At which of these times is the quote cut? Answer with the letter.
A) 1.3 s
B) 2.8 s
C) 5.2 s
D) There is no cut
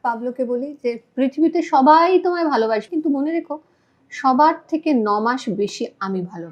B